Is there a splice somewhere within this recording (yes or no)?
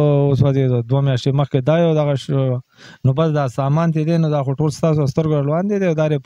no